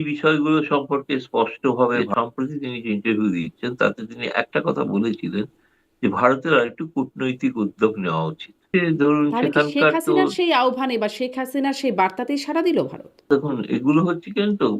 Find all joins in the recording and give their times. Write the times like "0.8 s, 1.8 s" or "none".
2.1 s, 8.7 s, 13.2 s